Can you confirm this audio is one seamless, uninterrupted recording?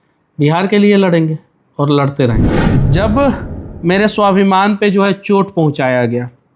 no; 1 cut; at 2.4 s

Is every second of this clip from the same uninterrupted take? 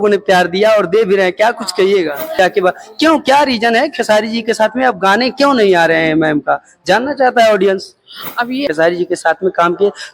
no; 2 cuts; at 2.4 s, 8.7 s

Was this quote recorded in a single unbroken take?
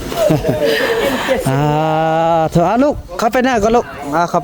yes; 0 cuts

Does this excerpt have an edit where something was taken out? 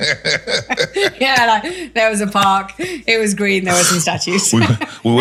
no; 0 cuts

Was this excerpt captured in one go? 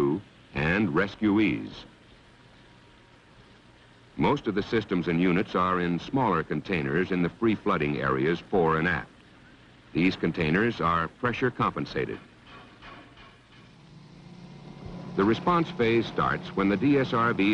no; 1 cut; at 10.3 s

